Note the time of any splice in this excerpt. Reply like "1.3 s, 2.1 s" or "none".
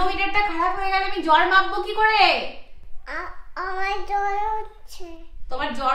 none